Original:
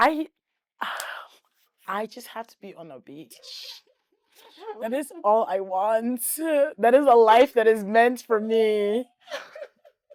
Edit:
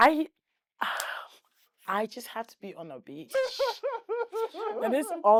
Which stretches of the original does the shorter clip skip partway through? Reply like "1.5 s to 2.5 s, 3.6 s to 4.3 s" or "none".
none

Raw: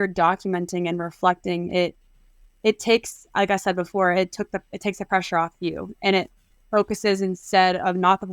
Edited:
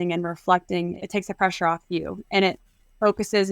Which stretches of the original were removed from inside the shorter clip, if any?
1.7 s to 4.6 s

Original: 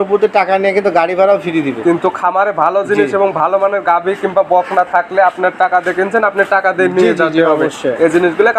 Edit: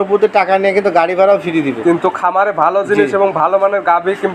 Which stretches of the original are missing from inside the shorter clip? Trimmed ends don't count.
none

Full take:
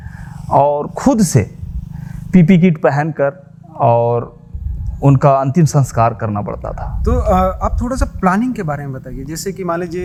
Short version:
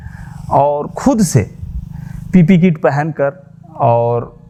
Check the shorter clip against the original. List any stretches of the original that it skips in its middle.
none

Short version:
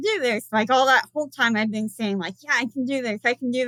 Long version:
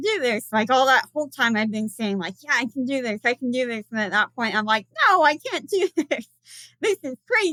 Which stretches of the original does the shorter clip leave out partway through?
none

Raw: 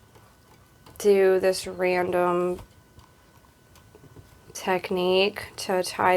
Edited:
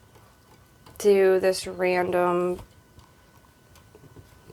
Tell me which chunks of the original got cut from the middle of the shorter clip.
none

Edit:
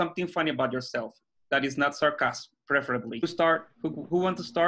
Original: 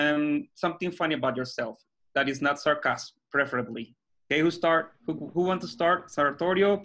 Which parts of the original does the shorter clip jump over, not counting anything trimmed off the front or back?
3.9 s to 4.5 s

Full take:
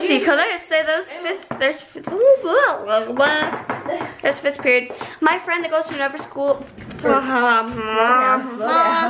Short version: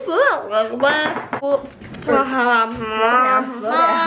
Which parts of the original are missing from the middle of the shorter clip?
3.7 s to 6.3 s

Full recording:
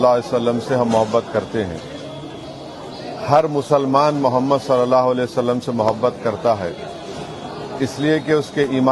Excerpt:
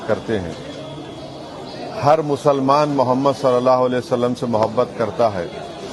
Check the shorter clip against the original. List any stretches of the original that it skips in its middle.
none

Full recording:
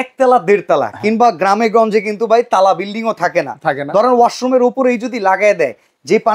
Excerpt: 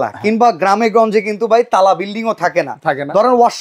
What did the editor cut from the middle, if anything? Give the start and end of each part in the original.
none

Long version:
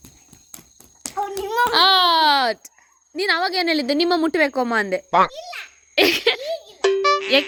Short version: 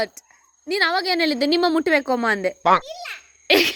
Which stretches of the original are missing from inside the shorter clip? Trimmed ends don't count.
none

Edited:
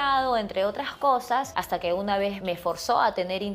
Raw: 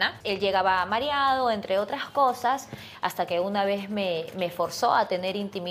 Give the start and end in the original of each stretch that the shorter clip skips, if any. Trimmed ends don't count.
2.7 s to 3.0 s, 3.8 s to 4.3 s

